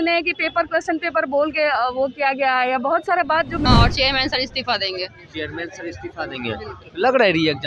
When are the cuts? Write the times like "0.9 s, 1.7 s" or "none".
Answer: 3.6 s